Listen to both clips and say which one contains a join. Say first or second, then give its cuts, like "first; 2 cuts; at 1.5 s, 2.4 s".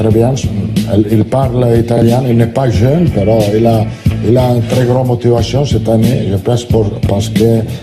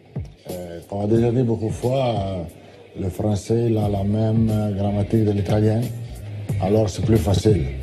first; 1 cut; at 4.6 s